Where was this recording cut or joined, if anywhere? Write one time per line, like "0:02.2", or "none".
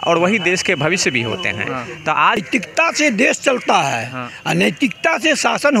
0:02.4